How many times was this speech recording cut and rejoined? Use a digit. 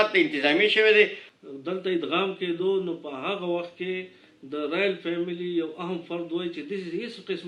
1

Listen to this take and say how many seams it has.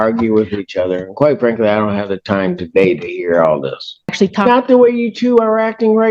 1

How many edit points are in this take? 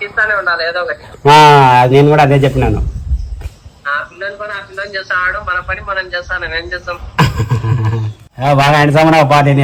0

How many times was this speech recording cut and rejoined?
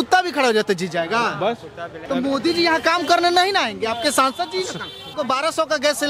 2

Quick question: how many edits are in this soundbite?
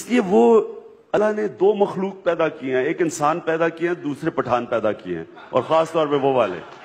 1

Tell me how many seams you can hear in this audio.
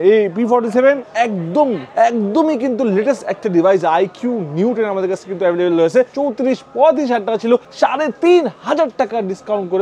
3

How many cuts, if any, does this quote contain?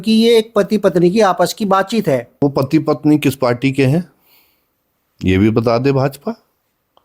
1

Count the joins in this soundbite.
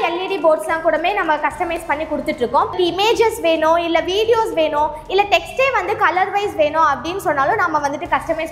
1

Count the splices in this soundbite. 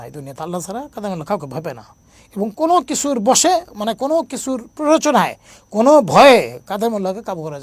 0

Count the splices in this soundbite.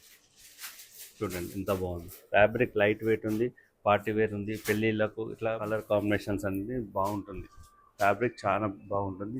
1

